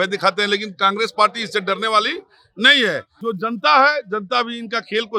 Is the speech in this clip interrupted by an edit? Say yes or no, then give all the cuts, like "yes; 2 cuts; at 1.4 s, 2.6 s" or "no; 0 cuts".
yes; 1 cut; at 3.1 s